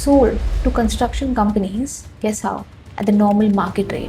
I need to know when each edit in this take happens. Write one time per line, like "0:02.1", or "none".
0:02.0
0:02.8